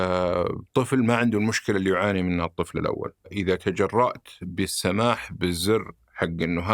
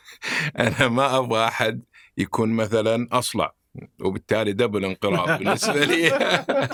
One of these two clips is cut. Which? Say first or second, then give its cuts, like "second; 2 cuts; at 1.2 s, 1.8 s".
first; 1 cut; at 3.3 s